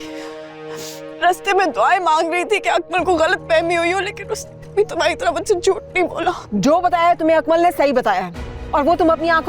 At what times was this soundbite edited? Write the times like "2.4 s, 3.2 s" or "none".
6.4 s